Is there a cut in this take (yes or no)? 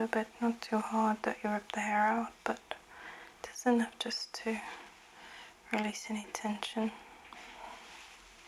no